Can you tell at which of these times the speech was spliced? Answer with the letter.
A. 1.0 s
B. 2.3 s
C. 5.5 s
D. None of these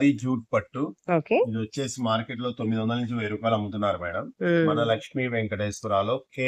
D